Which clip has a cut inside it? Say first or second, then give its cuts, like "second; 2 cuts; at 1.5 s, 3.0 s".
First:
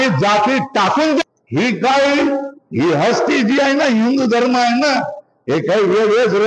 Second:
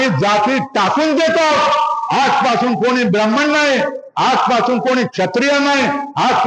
first; 1 cut; at 1.2 s